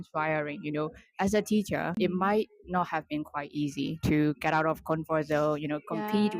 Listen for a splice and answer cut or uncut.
cut